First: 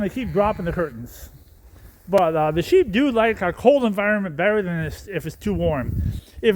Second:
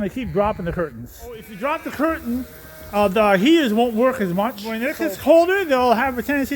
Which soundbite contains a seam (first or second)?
second